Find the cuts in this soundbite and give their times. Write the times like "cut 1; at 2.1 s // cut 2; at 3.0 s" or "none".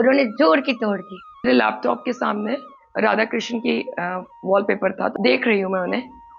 cut 1; at 1.5 s // cut 2; at 5.1 s